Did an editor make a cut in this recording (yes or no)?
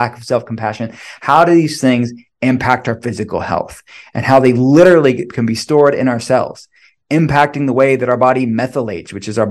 no